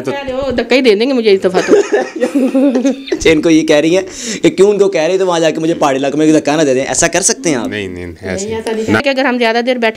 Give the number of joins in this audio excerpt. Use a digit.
1